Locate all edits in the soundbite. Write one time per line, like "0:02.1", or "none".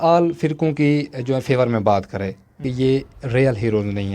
0:02.7